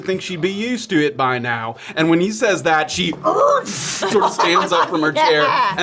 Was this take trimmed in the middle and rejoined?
no; 0 cuts

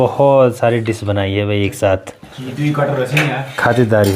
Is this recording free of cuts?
yes; 0 cuts

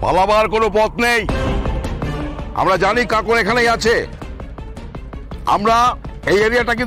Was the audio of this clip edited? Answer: no; 0 cuts

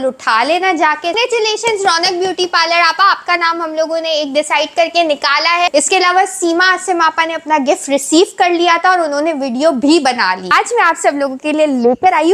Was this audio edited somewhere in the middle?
yes; 3 cuts; at 1.2 s, 5.7 s, 10.5 s

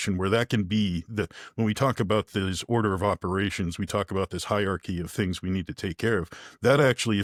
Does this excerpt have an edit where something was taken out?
no; 0 cuts

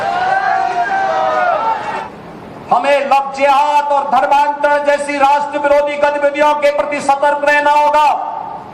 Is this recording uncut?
no; 1 cut; at 3.1 s

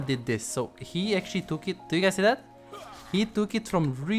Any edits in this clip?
no; 0 cuts

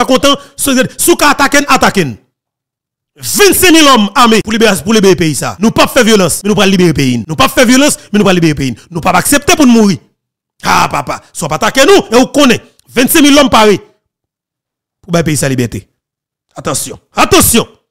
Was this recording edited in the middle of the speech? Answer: yes; 4 cuts; at 4.5 s, 5.5 s, 6.4 s, 7.2 s

